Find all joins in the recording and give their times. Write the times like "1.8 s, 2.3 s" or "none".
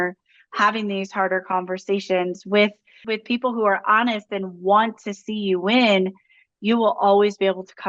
2.9 s